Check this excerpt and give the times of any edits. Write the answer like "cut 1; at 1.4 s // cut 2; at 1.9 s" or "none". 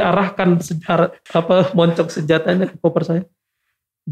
cut 1; at 1.2 s

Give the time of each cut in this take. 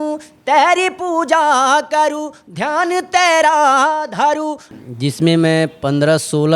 cut 1; at 4.6 s

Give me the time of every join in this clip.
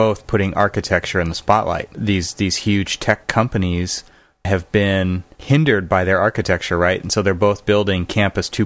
cut 1; at 4.5 s

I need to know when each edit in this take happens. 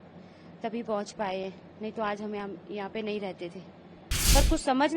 cut 1; at 4.0 s

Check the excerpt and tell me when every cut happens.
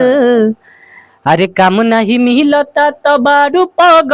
none

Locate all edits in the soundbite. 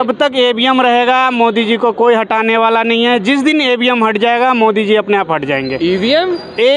none

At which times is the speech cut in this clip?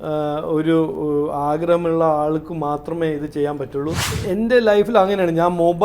cut 1; at 4.2 s

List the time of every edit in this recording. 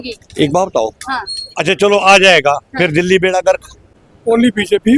cut 1; at 4.1 s

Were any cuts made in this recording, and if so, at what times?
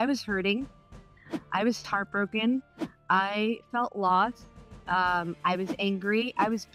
none

